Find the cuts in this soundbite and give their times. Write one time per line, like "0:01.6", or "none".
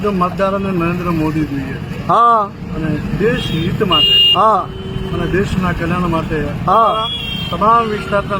none